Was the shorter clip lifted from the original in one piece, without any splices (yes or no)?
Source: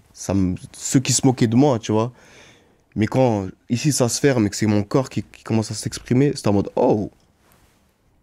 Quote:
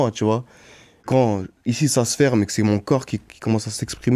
no